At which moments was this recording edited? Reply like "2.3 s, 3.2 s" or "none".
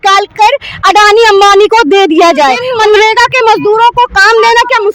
2.7 s